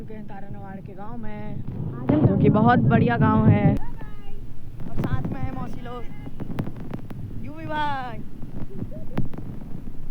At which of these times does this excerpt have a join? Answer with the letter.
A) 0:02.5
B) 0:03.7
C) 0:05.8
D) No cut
B